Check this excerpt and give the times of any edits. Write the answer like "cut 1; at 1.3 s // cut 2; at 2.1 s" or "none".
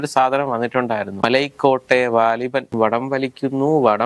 cut 1; at 1.2 s // cut 2; at 2.7 s